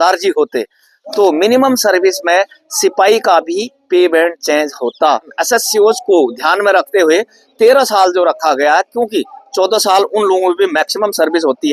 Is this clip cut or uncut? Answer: cut